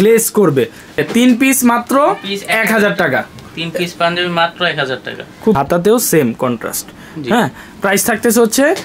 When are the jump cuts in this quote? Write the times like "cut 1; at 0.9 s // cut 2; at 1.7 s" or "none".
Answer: cut 1; at 1.0 s // cut 2; at 5.6 s